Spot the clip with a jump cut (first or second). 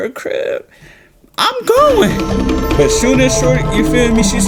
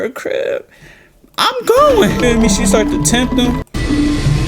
second